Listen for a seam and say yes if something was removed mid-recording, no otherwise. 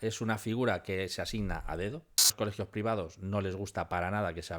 yes